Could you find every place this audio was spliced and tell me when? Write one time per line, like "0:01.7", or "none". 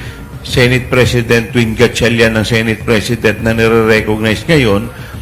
none